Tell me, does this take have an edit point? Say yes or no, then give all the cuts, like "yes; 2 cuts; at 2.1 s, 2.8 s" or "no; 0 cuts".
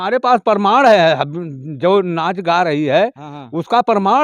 no; 0 cuts